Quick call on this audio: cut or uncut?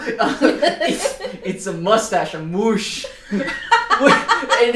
uncut